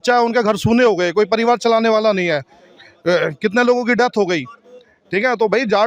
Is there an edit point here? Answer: no; 0 cuts

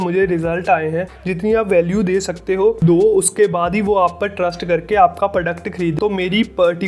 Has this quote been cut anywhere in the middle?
yes; 2 cuts; at 1.1 s, 5.9 s

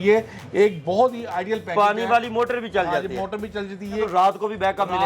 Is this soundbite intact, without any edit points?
no; 1 cut; at 4.1 s

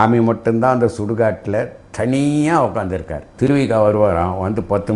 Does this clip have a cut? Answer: yes; 1 cut; at 3.2 s

